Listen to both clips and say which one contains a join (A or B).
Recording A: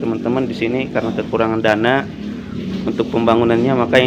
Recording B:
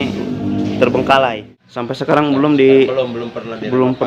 B